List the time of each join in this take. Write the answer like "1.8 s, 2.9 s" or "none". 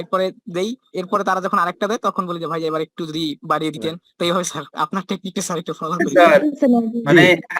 6.1 s